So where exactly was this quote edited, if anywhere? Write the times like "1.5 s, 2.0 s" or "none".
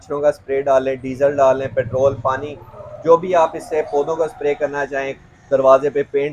none